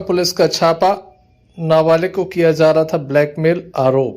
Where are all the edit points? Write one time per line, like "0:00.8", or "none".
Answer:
none

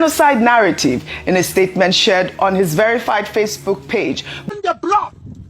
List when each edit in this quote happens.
0:04.3

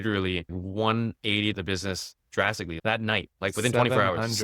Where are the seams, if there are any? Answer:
0:02.7

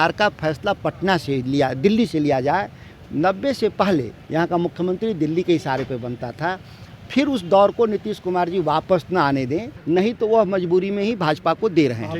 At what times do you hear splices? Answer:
0:04.2
0:09.7

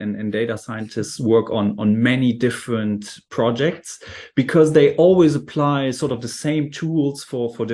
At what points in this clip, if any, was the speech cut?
none

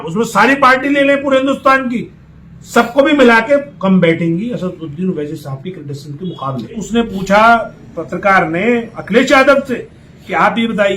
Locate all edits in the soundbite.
0:06.8

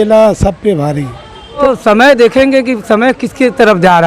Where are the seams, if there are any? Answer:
0:01.6

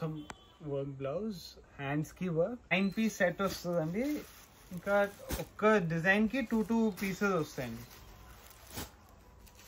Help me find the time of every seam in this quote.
0:02.7

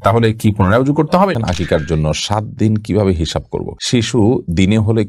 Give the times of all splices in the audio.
0:01.4
0:03.7

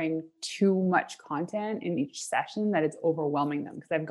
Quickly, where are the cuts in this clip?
none

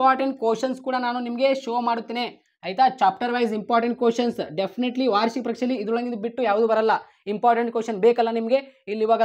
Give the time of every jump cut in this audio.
none

